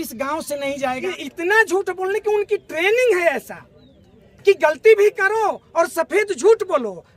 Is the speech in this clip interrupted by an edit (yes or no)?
yes